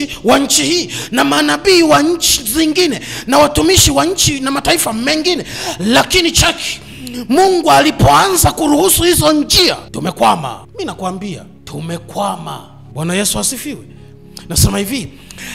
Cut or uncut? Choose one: cut